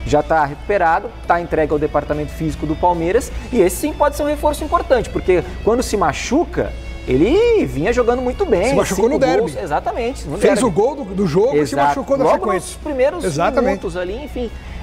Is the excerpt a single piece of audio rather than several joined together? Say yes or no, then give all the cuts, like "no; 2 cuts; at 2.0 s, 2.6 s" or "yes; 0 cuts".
yes; 0 cuts